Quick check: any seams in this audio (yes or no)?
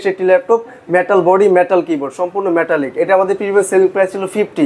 no